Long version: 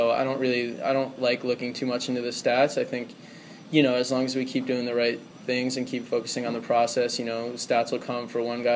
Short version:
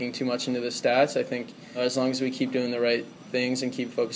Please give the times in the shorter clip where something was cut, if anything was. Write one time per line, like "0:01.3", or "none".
0:01.8

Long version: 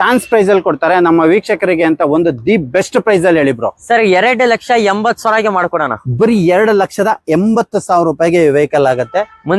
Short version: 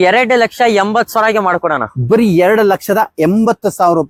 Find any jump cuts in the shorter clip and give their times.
none

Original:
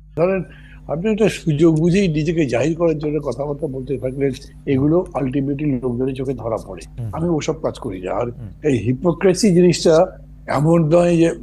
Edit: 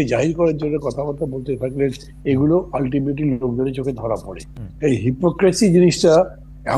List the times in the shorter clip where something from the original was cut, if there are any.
0:04.6

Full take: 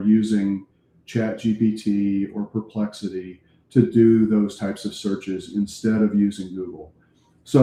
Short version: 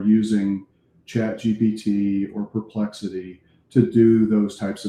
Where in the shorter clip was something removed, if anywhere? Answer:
none

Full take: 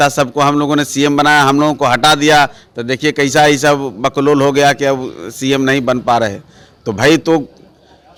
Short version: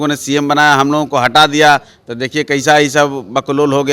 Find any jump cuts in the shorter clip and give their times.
none

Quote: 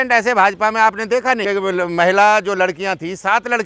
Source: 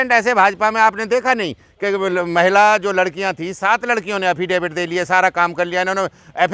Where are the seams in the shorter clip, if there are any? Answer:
0:01.4

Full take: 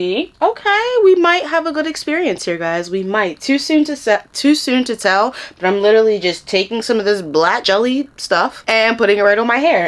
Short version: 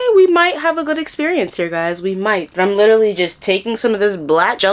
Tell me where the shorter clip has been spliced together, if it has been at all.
0:02.5

